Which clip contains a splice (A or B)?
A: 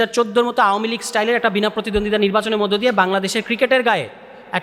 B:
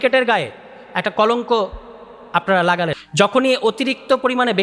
B